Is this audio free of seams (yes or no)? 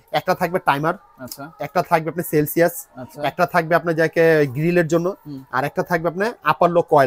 yes